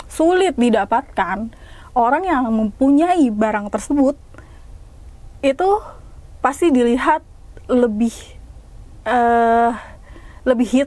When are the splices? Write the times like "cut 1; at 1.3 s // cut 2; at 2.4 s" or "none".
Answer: none